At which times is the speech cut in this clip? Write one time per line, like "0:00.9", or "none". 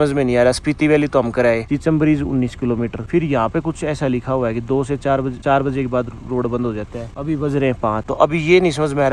none

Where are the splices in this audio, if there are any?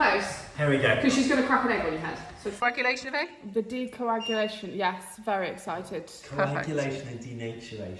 0:02.6

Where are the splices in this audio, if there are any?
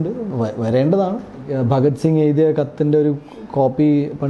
0:01.5

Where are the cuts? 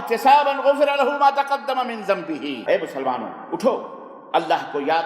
0:02.5

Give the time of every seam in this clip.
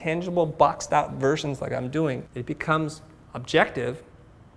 0:02.3

